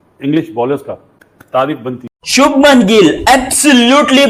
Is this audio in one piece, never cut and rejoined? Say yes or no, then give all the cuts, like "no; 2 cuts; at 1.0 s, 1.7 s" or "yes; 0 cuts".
no; 1 cut; at 2.1 s